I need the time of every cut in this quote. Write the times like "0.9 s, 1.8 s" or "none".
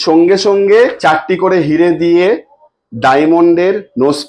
1.0 s